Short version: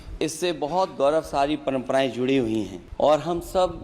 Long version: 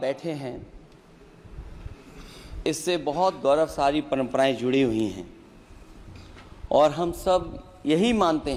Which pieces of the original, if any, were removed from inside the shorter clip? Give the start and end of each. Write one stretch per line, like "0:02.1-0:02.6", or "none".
0:05.3-0:06.5